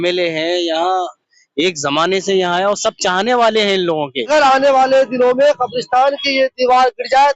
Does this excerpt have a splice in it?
yes; 1 cut; at 4.3 s

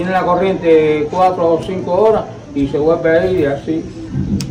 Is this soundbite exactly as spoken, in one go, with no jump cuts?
yes; 0 cuts

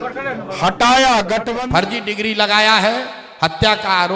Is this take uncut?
no; 1 cut; at 1.5 s

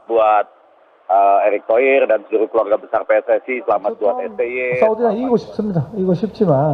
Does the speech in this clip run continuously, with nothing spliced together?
no; 1 cut; at 4.7 s

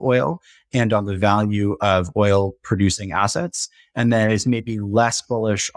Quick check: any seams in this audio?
no; 0 cuts

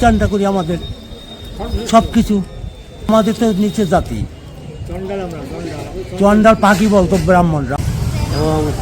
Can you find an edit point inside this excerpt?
yes; 2 cuts; at 3.1 s, 7.8 s

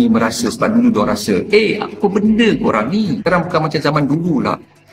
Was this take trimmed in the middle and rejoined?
yes; 1 cut; at 3.2 s

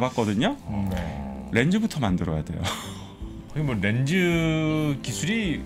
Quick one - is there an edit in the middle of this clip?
yes; 1 cut; at 3.4 s

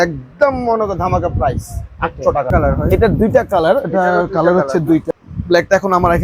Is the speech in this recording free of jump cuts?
no; 2 cuts; at 2.5 s, 5.1 s

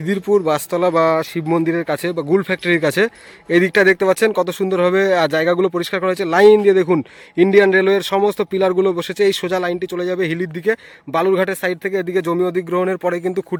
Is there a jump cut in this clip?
no; 0 cuts

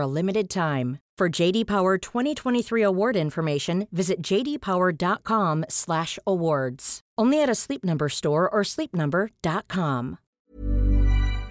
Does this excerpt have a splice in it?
yes; 1 cut; at 10.3 s

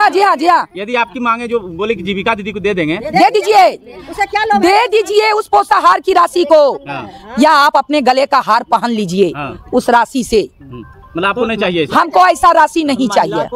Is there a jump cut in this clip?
no; 0 cuts

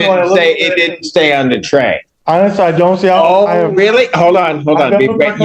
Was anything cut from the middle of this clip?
yes; 1 cut; at 2.1 s

